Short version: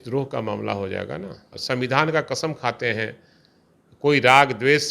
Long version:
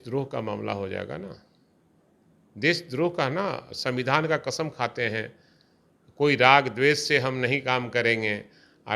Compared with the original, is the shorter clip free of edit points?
no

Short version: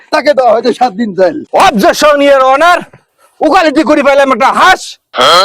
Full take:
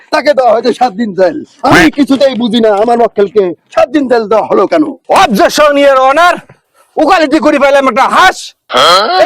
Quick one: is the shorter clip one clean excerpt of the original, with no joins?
no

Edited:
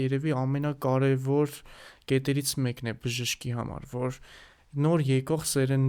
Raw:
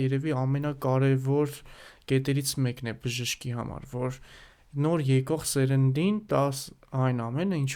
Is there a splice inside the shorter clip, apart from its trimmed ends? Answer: no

